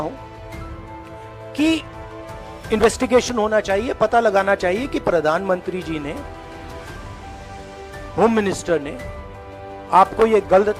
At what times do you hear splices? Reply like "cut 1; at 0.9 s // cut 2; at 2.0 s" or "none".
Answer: none